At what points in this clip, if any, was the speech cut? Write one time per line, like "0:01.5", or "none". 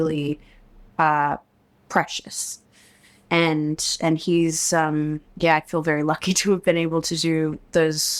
none